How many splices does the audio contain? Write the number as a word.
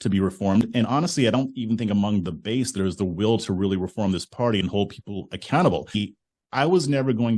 one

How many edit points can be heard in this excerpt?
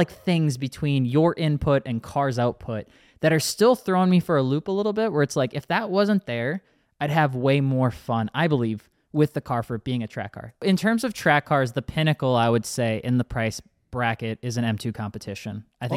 one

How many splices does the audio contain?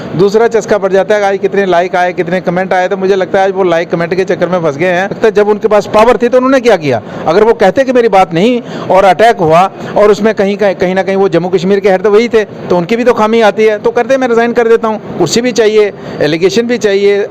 two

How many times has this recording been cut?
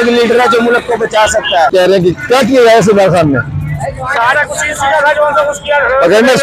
one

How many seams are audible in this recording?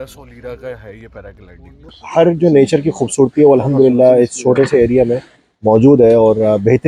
one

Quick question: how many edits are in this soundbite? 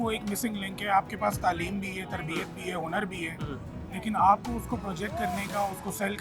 zero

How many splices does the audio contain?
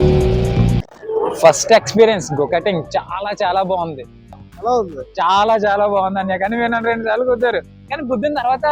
zero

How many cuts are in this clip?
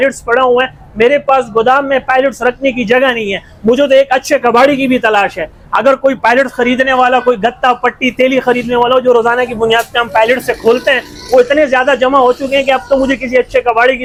zero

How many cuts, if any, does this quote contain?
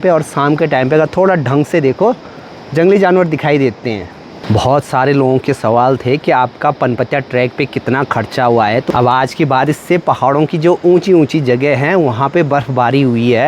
two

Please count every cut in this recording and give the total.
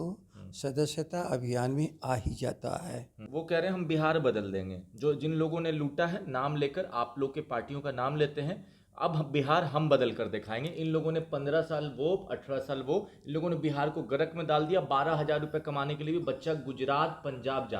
one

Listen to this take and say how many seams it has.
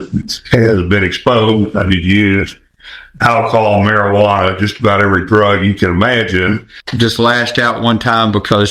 one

